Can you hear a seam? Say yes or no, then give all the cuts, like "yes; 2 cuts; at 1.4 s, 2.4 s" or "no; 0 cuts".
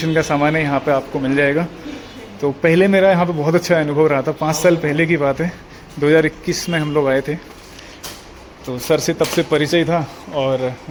no; 0 cuts